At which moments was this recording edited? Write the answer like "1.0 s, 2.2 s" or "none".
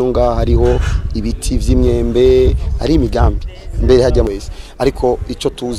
4.3 s